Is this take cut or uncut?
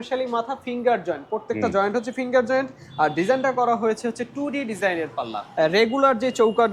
cut